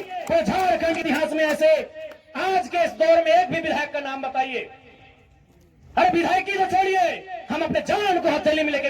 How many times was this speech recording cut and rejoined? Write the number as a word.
one